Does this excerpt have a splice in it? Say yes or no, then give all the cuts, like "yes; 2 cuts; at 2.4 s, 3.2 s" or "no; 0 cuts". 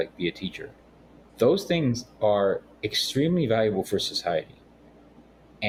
no; 0 cuts